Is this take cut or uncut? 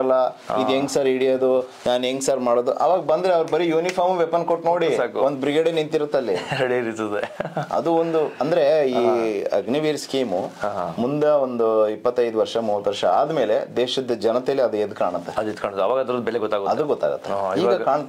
uncut